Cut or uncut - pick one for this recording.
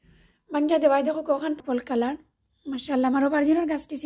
cut